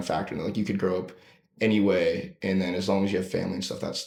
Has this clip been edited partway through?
no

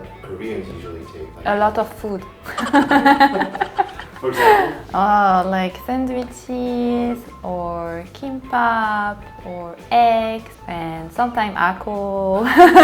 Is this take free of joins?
yes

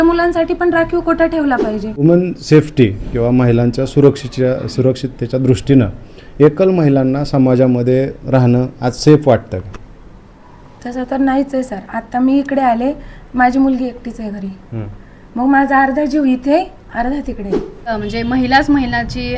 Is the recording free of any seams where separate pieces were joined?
no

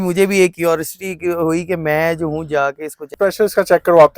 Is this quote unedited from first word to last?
no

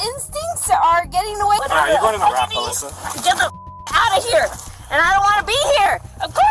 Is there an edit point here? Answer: yes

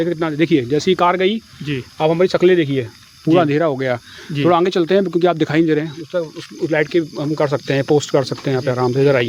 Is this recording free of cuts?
yes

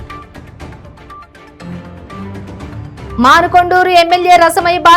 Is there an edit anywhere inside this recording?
yes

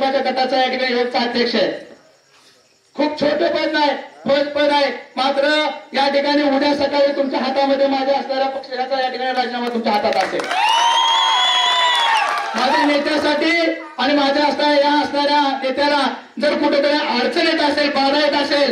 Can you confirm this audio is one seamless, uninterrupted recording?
yes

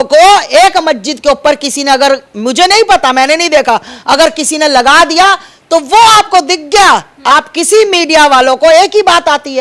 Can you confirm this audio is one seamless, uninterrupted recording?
yes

